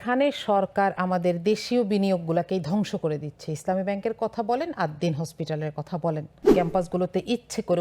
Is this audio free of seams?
no; 1 cut; at 6.4 s

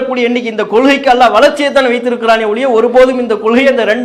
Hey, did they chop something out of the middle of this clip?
no; 0 cuts

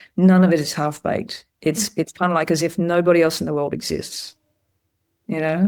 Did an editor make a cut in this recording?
no; 0 cuts

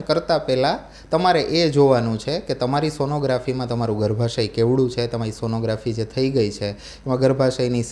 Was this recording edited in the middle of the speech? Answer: no; 0 cuts

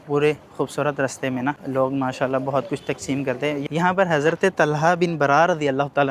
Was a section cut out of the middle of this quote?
yes; 1 cut; at 3.6 s

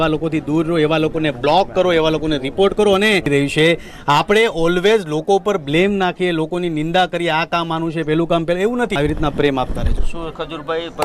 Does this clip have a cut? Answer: yes; 2 cuts; at 3.3 s, 8.9 s

